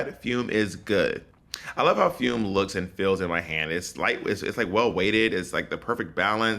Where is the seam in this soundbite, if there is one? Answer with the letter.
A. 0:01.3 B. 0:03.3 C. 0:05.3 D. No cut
A